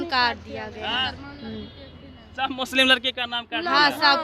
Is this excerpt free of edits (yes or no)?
yes